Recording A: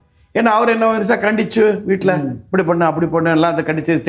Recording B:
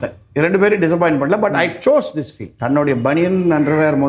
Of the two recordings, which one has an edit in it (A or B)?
B